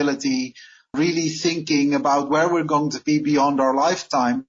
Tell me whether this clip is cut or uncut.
uncut